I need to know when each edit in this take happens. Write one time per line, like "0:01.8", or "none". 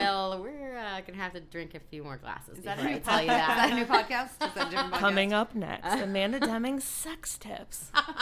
none